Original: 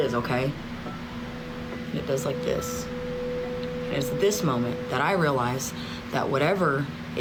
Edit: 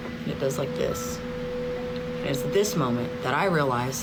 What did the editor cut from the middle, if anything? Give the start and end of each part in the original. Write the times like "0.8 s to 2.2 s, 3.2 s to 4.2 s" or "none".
none